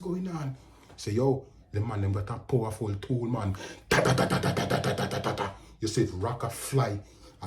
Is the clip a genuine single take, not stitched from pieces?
yes; 0 cuts

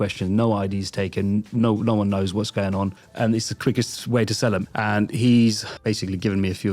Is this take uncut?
no; 3 cuts; at 3.0 s, 4.6 s, 5.7 s

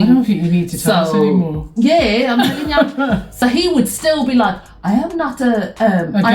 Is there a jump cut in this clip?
yes; 1 cut; at 3.3 s

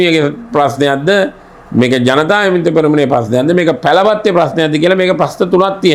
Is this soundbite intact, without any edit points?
yes; 0 cuts

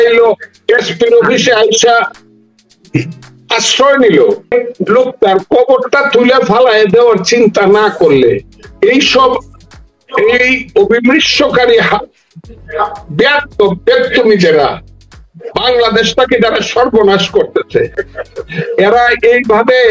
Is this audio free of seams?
no; 1 cut; at 4.5 s

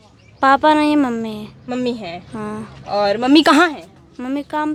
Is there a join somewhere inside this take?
no; 0 cuts

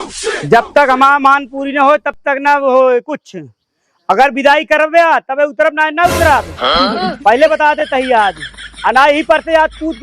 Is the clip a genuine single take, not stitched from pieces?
yes; 0 cuts

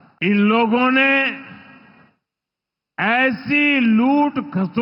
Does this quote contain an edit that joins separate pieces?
no; 0 cuts

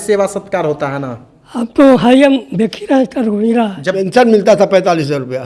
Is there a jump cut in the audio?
yes; 1 cut; at 3.9 s

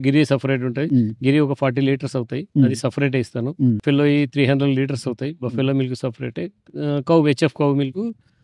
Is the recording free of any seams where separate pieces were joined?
yes; 0 cuts

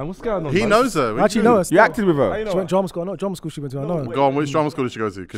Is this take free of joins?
no; 1 cut; at 2.5 s

